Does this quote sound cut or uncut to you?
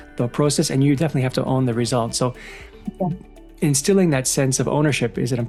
uncut